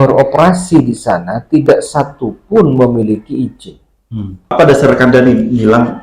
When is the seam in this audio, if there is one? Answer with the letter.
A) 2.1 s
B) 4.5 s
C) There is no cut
B